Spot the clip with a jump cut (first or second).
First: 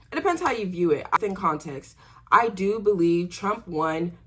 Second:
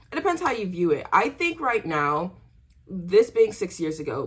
first